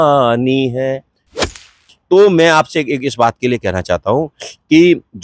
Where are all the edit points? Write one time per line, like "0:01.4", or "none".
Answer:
0:01.3